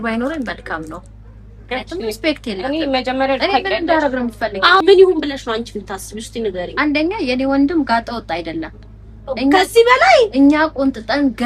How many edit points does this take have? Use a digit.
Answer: 1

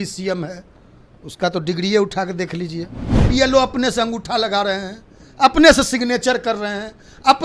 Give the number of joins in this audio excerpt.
1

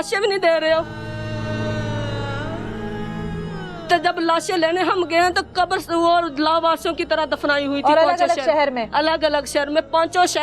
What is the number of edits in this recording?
2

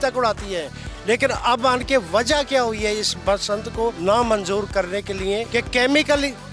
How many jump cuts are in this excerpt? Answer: 2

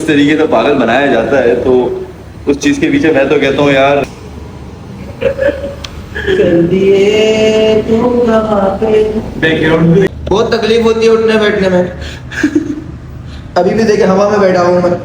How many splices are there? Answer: 2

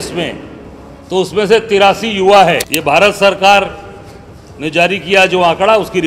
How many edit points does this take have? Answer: 1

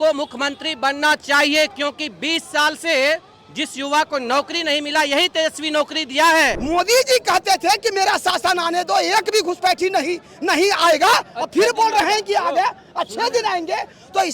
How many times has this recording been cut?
1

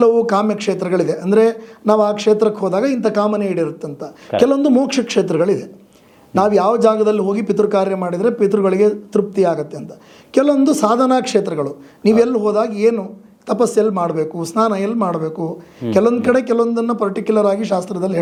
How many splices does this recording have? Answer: 0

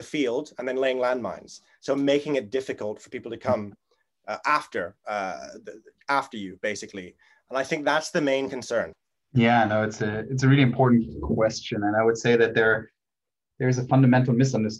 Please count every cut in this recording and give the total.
1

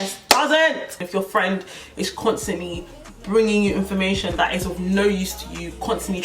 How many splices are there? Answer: 1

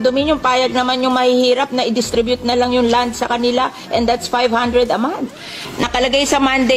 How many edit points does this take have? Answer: 0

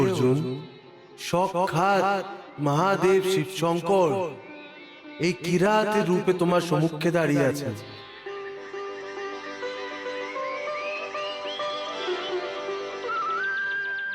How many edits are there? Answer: 1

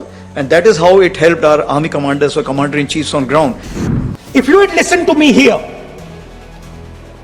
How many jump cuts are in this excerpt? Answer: 1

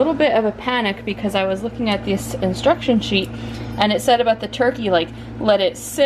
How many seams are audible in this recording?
0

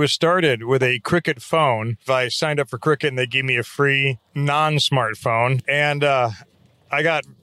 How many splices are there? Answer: 3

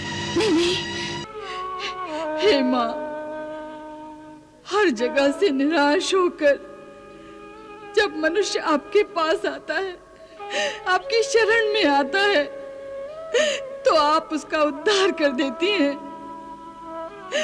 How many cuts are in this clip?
1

